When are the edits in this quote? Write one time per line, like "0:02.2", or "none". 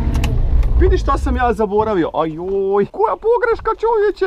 0:02.9